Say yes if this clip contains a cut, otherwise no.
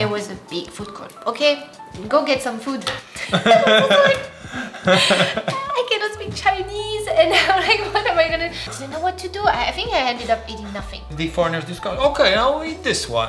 yes